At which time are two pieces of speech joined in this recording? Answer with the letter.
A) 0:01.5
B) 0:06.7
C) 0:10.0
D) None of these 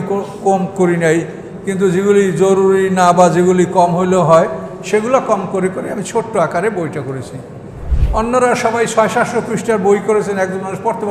D